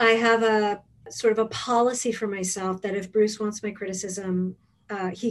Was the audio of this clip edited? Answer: yes; 1 cut; at 1.1 s

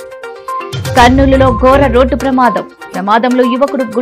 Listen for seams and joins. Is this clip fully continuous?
yes; 0 cuts

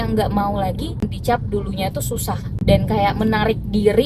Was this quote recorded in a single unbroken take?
no; 2 cuts; at 1.0 s, 2.5 s

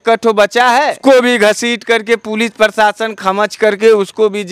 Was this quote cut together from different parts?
yes; 1 cut; at 1.0 s

